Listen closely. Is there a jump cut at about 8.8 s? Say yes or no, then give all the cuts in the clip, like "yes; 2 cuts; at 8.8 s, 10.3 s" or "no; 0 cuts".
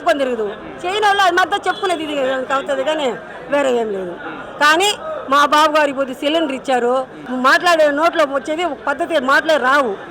no; 1 cut; at 7.2 s